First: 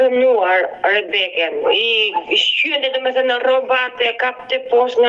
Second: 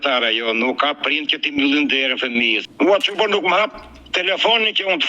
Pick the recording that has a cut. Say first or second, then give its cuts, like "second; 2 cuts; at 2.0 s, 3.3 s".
second; 1 cut; at 2.6 s